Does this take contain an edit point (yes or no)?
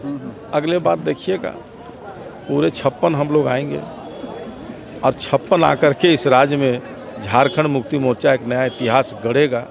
no